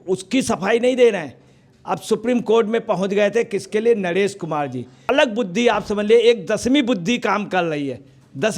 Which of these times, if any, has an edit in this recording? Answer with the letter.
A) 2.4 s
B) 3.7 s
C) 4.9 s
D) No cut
C